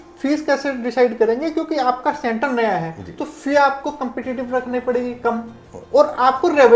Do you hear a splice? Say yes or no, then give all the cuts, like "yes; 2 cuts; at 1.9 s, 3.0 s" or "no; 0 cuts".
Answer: no; 0 cuts